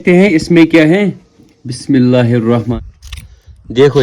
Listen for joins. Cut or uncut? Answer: cut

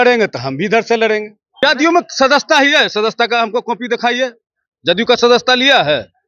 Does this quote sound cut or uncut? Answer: cut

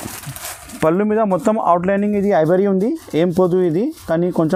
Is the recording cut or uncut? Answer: uncut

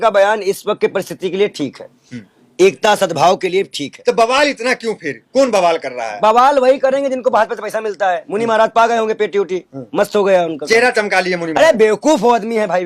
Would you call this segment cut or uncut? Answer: uncut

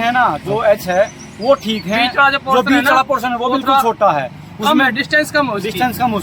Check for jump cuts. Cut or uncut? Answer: uncut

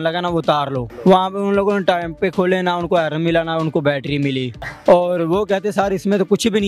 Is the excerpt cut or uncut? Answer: cut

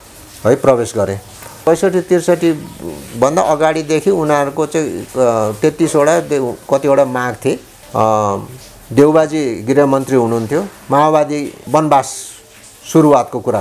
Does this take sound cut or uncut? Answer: cut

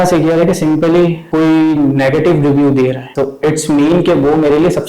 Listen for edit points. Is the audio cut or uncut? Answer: cut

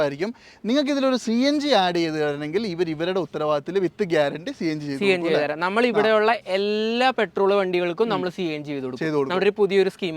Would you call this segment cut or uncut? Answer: uncut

